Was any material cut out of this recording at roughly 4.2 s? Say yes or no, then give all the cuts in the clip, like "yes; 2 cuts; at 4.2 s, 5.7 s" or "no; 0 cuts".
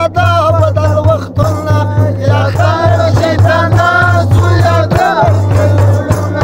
no; 0 cuts